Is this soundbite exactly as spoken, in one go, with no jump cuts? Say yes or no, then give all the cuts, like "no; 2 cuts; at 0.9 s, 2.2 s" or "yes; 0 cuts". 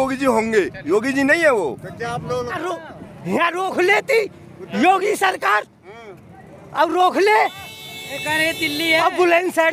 no; 1 cut; at 2.6 s